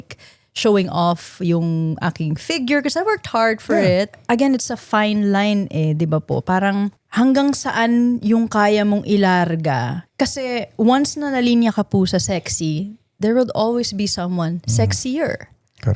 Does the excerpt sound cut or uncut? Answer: cut